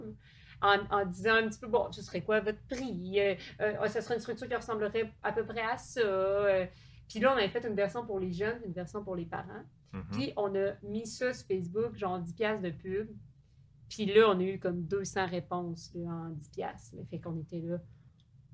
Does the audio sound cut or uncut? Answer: uncut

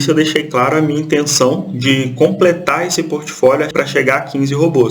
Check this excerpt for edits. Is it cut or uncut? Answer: cut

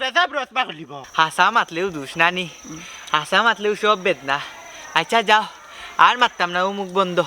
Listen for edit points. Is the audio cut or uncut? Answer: cut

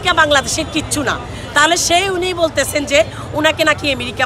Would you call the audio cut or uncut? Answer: uncut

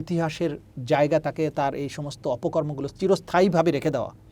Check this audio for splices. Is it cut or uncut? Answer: uncut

